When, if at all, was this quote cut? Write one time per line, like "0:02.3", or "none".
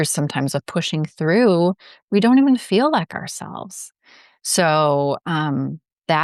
none